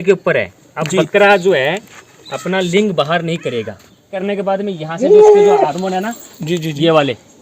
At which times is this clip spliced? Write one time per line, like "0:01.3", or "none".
0:04.2